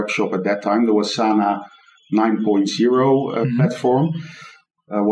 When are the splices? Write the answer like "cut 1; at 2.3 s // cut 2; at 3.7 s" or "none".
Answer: none